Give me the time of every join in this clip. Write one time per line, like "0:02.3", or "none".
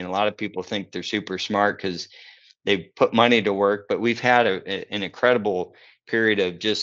none